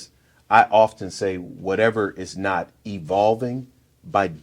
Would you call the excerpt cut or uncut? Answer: uncut